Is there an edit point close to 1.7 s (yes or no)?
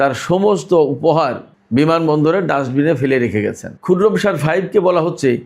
no